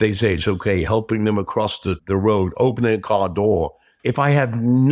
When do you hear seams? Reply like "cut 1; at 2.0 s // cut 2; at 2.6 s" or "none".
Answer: cut 1; at 3.9 s